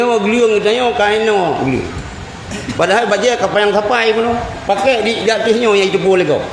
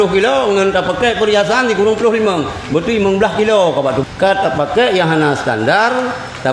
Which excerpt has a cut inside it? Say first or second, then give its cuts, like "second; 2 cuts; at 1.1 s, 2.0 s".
second; 1 cut; at 4.0 s